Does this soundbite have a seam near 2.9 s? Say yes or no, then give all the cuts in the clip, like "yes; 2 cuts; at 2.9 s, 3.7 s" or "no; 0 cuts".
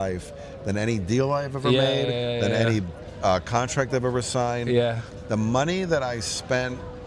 no; 1 cut; at 5.1 s